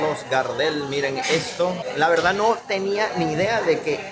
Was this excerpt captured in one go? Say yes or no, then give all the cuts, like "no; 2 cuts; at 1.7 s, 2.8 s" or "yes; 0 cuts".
yes; 0 cuts